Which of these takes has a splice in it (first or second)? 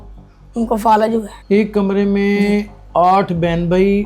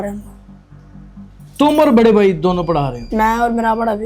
first